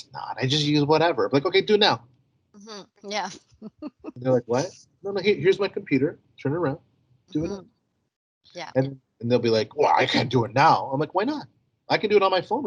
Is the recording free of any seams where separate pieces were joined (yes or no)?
yes